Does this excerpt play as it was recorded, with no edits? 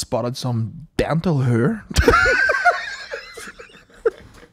yes; 0 cuts

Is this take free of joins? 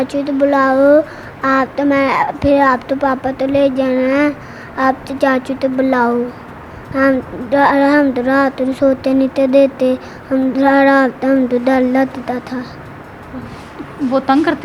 yes; 0 cuts

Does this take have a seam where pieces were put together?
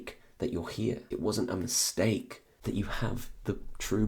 yes; 2 cuts; at 1.0 s, 2.4 s

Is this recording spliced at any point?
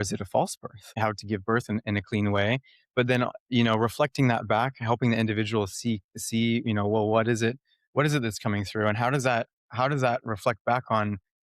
yes; 1 cut; at 0.9 s

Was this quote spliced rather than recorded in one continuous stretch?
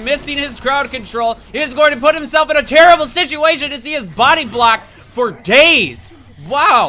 yes; 1 cut; at 2.0 s

